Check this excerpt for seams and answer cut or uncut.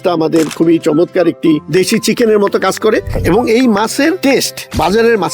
cut